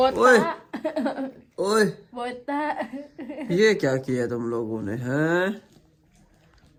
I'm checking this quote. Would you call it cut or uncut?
uncut